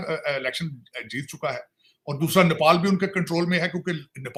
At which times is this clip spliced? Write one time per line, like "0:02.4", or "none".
none